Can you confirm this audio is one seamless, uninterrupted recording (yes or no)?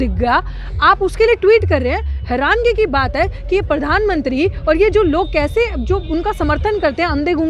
yes